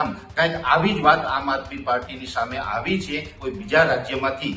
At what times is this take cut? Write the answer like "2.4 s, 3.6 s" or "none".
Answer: 3.3 s